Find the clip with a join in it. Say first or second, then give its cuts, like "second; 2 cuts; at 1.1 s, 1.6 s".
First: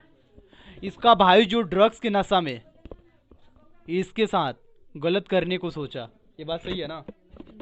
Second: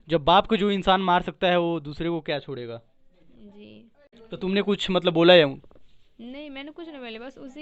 second; 1 cut; at 4.1 s